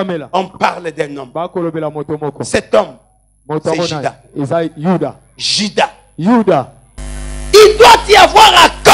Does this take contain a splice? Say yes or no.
yes